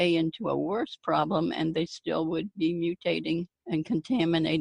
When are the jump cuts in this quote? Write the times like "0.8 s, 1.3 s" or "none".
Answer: 3.5 s